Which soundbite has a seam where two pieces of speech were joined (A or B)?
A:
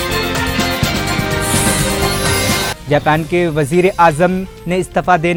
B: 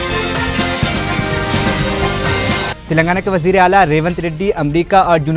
B